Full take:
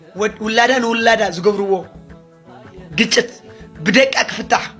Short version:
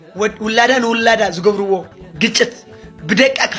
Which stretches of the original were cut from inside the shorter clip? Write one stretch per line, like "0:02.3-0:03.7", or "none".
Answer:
0:02.0-0:02.8